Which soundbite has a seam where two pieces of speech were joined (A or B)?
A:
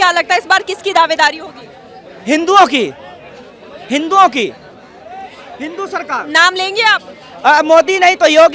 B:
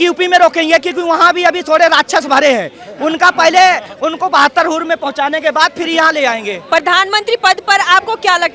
B